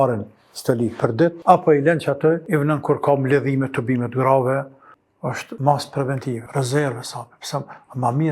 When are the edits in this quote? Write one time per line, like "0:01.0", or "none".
0:01.4
0:02.4
0:05.0
0:06.4

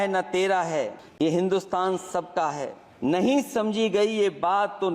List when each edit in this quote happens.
0:01.0
0:02.8

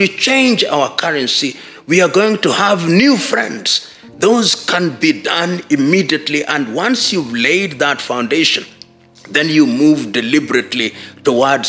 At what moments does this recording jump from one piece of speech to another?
none

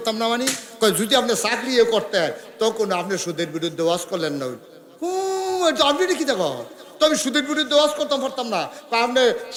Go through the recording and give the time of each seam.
none

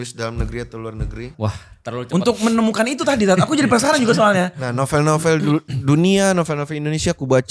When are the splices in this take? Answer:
0:01.3

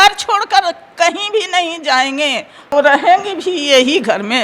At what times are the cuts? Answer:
0:02.7

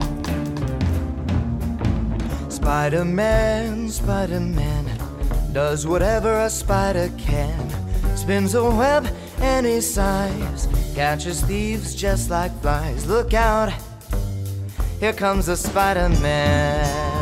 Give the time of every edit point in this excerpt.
none

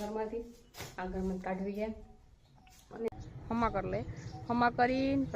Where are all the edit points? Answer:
0:03.1

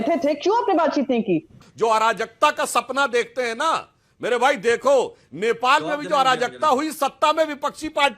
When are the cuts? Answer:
0:01.6

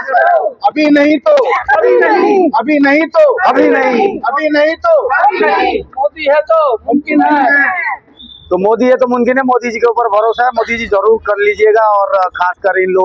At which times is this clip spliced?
none

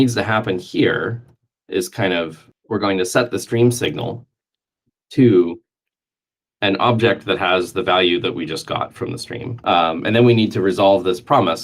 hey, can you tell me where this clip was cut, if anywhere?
0:02.4

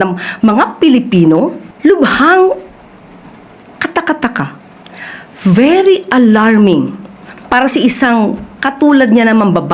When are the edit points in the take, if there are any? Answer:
0:01.6

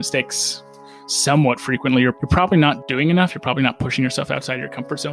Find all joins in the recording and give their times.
0:02.9

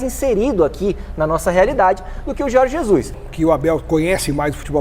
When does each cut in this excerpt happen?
0:03.2

